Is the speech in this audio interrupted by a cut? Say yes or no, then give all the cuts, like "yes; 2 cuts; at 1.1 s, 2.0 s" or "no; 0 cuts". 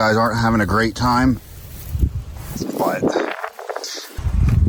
no; 0 cuts